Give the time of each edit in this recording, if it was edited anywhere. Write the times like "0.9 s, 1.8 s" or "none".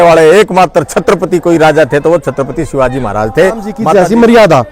3.8 s